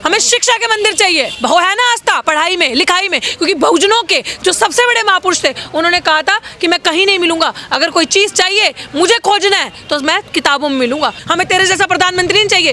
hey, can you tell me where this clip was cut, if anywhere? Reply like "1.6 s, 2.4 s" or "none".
1.3 s, 11.2 s